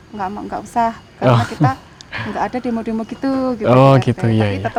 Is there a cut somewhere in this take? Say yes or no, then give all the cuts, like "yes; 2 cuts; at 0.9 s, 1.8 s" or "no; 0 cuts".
no; 0 cuts